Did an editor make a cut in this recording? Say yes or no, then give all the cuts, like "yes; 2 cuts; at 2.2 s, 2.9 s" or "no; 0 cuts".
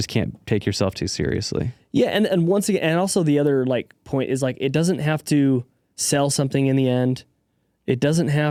no; 0 cuts